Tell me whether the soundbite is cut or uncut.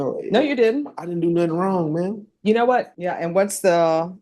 cut